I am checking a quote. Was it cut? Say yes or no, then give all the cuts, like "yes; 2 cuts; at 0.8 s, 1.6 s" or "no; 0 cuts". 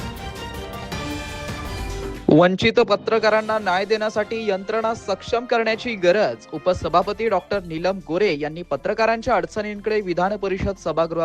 yes; 1 cut; at 1.9 s